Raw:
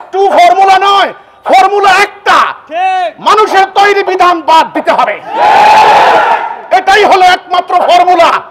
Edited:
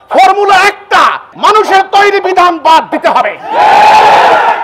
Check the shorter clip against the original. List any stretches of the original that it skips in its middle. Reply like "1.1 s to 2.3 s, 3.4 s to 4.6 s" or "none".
2.6 s to 3.1 s